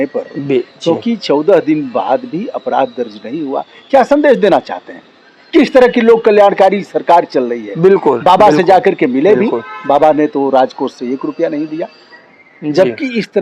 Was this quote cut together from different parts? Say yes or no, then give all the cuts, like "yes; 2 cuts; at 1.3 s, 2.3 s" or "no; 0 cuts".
no; 0 cuts